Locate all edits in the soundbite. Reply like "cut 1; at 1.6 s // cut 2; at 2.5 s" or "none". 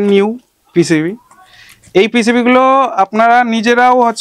none